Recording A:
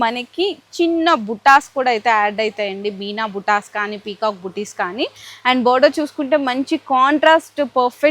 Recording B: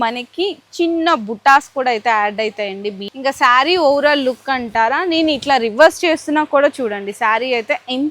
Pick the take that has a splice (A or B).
B